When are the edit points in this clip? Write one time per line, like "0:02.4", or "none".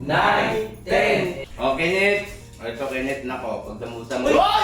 0:01.4